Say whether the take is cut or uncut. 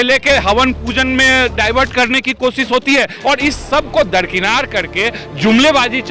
cut